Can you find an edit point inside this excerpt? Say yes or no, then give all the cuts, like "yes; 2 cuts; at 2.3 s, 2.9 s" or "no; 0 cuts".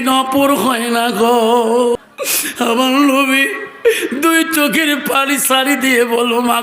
yes; 1 cut; at 2.0 s